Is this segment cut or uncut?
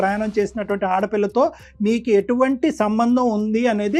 uncut